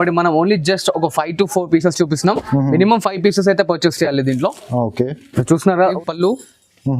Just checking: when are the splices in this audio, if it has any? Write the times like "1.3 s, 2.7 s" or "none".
5.9 s